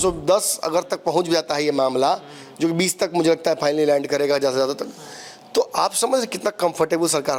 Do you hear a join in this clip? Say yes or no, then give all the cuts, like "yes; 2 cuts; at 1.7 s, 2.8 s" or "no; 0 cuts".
no; 0 cuts